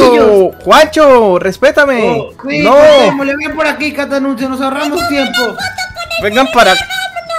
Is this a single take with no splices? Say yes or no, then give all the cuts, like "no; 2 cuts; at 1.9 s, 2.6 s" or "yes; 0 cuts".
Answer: no; 1 cut; at 2.4 s